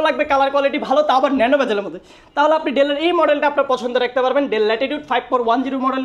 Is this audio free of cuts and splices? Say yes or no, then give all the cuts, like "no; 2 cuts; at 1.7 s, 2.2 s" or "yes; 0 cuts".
yes; 0 cuts